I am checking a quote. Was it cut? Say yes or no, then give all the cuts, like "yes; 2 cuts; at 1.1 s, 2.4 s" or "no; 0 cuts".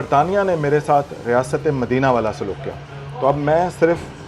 no; 0 cuts